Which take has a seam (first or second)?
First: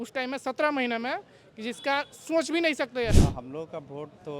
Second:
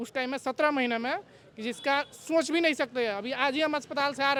first